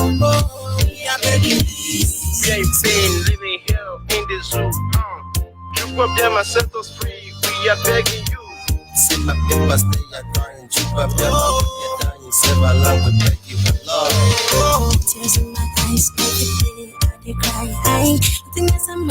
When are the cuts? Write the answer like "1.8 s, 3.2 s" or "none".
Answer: 1.6 s